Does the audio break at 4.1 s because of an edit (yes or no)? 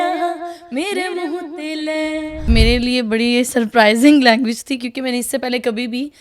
no